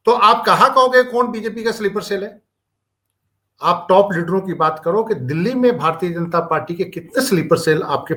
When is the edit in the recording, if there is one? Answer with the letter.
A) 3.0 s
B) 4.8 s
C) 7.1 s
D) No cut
D